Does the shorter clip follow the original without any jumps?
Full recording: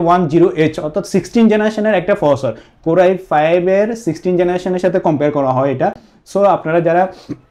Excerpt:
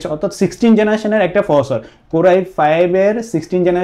yes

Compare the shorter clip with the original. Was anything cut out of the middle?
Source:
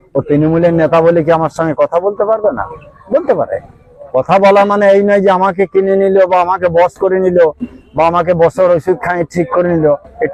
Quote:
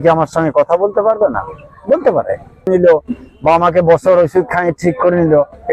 yes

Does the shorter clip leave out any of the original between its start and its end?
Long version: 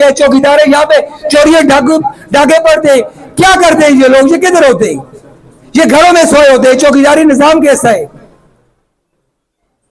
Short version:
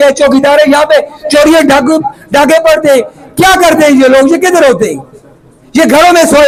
no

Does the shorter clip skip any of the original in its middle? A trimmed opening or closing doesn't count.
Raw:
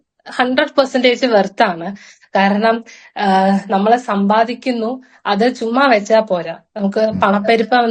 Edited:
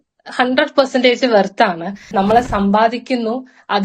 yes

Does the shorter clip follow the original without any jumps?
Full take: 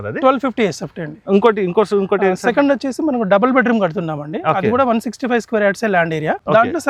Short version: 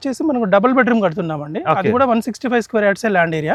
yes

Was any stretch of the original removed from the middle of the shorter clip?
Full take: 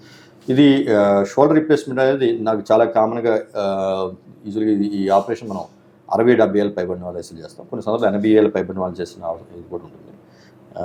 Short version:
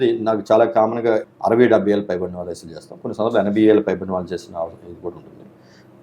yes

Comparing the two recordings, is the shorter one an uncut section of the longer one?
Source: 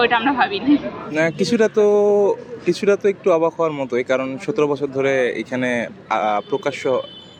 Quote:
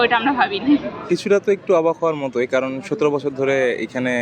no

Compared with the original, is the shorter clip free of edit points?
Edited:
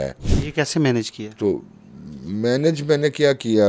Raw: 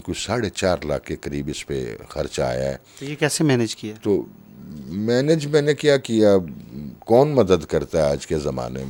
yes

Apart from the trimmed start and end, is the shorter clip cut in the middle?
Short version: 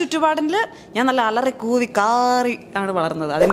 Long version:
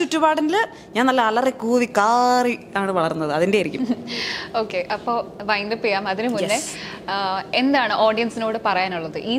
no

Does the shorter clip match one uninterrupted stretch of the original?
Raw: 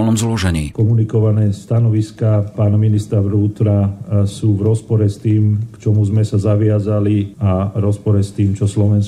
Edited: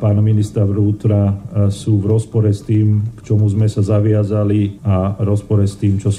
yes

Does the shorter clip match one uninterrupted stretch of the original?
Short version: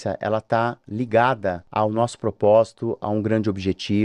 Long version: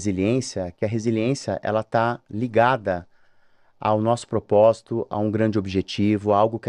no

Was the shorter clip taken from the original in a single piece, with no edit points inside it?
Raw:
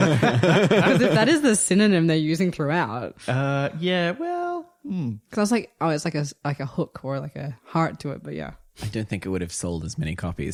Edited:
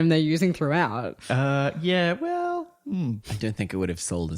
no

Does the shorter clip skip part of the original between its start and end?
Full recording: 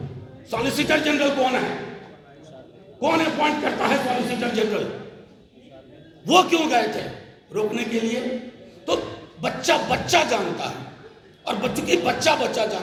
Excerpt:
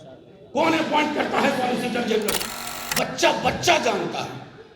yes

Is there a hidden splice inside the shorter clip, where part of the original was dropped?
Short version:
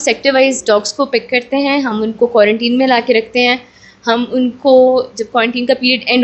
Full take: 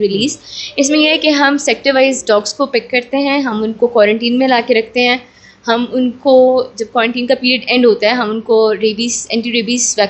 no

